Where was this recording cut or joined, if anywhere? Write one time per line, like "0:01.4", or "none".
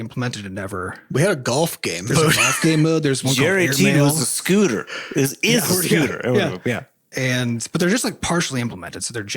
0:01.0
0:06.9